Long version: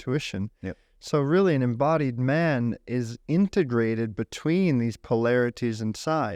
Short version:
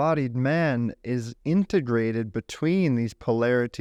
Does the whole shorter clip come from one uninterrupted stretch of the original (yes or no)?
yes